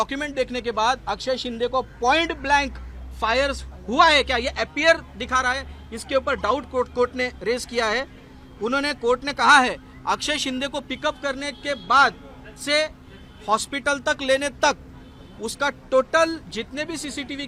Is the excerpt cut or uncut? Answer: uncut